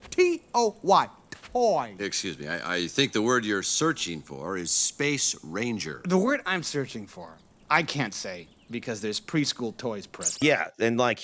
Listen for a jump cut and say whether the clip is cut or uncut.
uncut